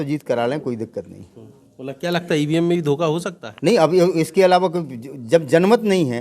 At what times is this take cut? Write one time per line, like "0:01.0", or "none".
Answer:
none

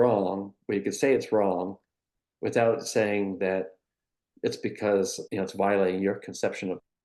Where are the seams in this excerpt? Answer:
0:04.2
0:05.2

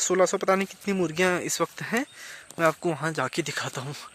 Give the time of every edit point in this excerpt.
none

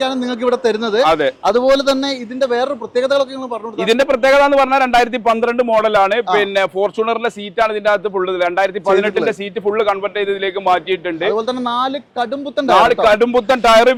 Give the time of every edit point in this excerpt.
none

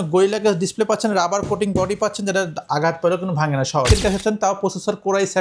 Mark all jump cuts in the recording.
0:03.9

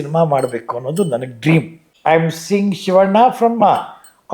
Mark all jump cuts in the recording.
0:01.8

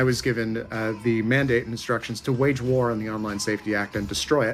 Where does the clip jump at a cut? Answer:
none

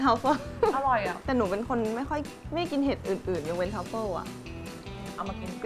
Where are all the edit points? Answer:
0:01.2

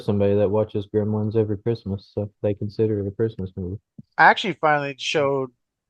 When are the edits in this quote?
none

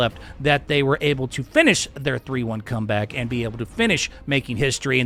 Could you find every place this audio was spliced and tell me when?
none

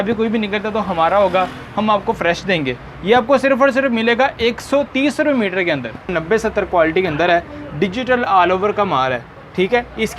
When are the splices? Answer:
0:06.1

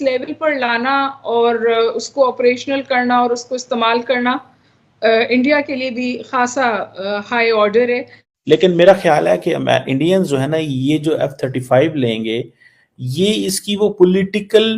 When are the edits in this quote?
0:08.5

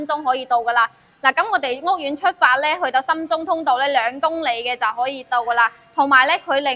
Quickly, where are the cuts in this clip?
none

